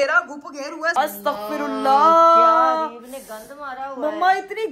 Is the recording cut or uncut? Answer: cut